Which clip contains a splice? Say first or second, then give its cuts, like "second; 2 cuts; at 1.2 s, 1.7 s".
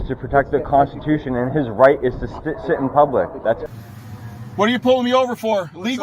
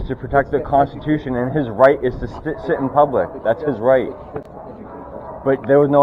first; 1 cut; at 3.6 s